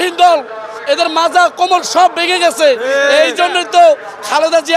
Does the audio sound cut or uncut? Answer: uncut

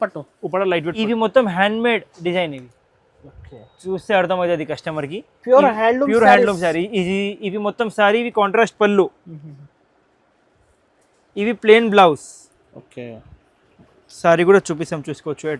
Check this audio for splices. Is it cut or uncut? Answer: cut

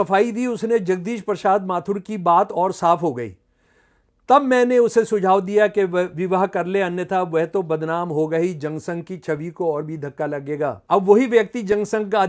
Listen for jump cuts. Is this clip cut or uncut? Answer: cut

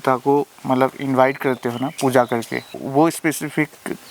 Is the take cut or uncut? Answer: cut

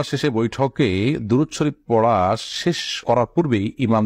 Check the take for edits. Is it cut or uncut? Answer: uncut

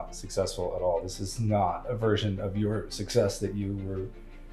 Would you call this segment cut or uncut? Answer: uncut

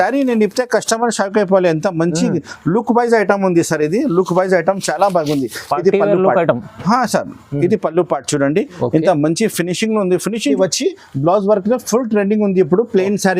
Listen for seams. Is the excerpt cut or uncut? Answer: cut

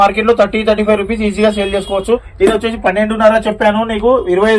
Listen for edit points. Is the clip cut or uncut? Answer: cut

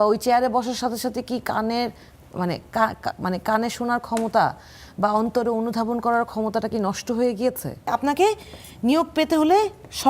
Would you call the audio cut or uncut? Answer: cut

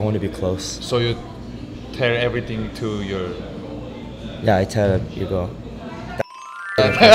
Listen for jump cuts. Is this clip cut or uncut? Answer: uncut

